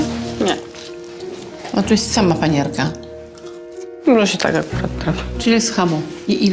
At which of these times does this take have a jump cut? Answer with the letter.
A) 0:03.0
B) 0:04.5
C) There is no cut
C